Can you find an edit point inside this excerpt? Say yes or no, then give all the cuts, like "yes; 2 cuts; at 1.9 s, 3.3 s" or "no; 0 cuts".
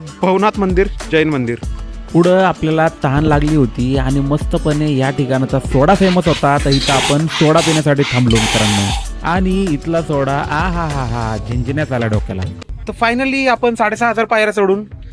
no; 0 cuts